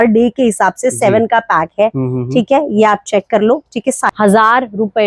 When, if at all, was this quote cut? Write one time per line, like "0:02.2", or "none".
0:04.0